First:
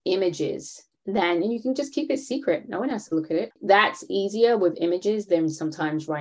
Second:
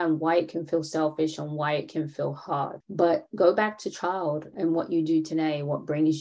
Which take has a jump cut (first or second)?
second